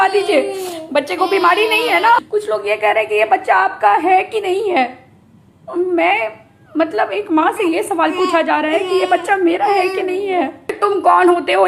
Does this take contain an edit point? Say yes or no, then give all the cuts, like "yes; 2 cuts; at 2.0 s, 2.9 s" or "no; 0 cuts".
yes; 2 cuts; at 2.2 s, 10.7 s